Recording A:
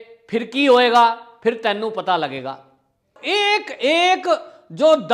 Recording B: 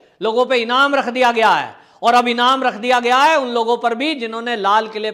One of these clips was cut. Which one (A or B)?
A